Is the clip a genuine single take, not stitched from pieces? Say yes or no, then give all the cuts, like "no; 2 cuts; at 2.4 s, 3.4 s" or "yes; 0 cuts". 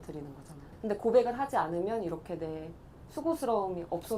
yes; 0 cuts